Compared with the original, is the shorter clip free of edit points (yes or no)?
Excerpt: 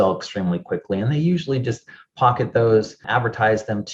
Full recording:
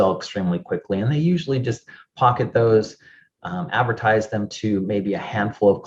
no